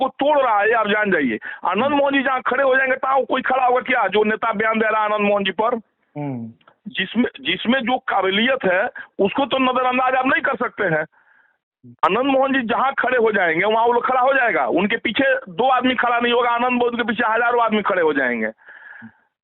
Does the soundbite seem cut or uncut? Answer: uncut